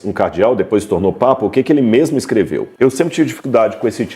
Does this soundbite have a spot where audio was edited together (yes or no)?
yes